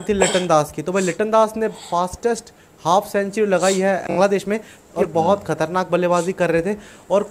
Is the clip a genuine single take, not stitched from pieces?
no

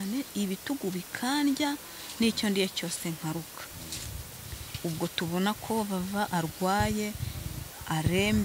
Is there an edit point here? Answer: no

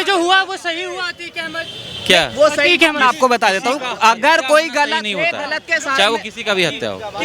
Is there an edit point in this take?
no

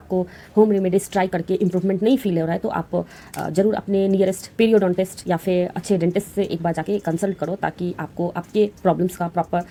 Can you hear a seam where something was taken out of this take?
no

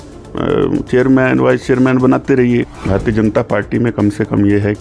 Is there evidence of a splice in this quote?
yes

